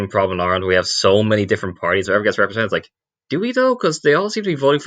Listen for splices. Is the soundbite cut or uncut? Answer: cut